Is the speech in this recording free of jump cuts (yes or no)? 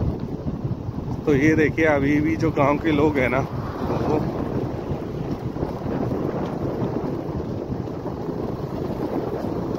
yes